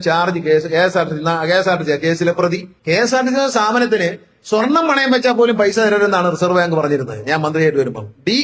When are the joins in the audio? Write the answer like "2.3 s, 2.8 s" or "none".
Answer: 2.7 s